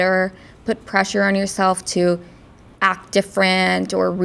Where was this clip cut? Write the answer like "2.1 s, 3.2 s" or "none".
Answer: none